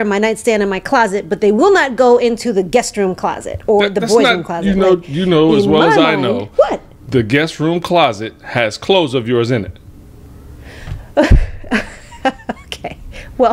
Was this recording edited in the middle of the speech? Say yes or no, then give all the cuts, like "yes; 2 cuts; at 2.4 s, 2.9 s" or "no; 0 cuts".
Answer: no; 0 cuts